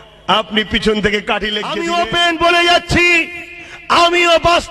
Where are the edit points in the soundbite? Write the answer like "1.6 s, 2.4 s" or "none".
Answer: 1.7 s